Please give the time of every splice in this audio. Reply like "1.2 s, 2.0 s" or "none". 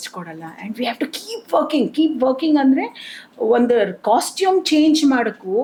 none